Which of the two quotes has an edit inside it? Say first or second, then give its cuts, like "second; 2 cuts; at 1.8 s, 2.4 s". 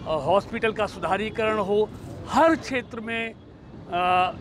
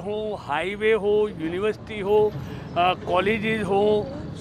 first; 1 cut; at 2.0 s